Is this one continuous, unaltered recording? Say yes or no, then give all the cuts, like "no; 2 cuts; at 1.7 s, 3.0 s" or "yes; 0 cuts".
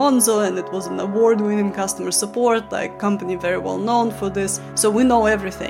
no; 1 cut; at 4.6 s